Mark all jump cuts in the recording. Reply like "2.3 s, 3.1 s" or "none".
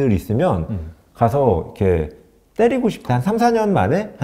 3.1 s